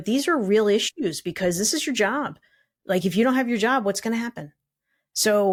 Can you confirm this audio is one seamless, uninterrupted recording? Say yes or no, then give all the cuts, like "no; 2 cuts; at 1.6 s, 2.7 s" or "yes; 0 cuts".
yes; 0 cuts